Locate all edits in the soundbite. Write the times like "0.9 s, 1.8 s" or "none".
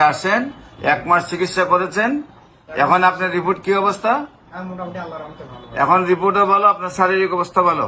none